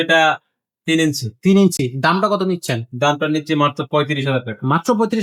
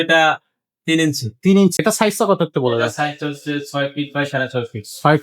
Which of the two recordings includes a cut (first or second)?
second